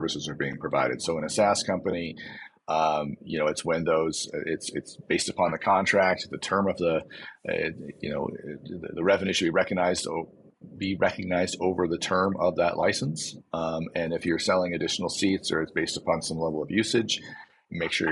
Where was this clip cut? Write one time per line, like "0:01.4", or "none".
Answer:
none